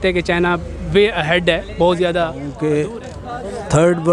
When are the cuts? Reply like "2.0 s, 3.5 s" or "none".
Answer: 2.4 s